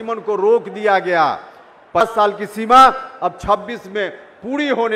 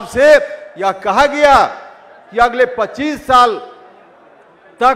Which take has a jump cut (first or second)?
first